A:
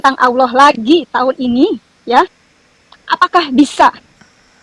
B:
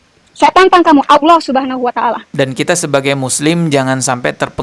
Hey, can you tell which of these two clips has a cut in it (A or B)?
B